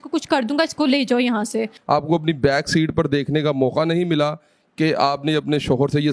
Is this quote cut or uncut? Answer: cut